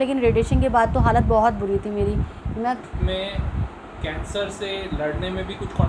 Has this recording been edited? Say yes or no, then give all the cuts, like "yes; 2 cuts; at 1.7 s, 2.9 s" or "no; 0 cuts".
yes; 1 cut; at 2.9 s